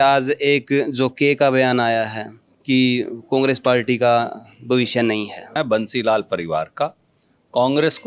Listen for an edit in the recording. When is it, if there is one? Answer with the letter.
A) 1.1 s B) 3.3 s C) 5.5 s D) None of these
C